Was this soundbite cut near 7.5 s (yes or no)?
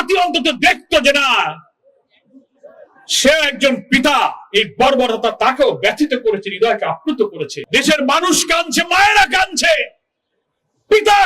yes